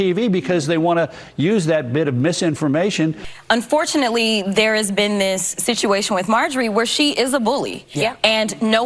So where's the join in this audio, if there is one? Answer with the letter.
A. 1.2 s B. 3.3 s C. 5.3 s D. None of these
B